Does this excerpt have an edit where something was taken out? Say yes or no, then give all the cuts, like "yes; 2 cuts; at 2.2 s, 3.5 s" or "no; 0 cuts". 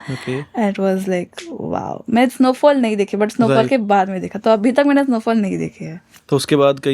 no; 0 cuts